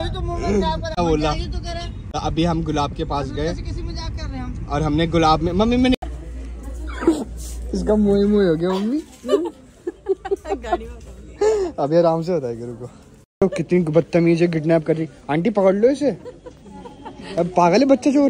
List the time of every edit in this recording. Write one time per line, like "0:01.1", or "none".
0:06.0
0:13.4